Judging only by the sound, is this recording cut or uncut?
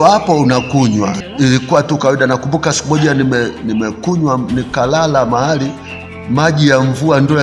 cut